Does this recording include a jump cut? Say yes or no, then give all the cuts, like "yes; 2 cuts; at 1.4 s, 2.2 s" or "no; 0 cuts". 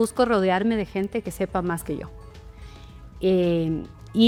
no; 0 cuts